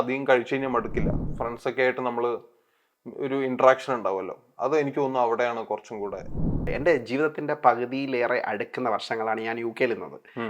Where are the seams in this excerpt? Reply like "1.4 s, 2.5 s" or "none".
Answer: 1.2 s, 6.7 s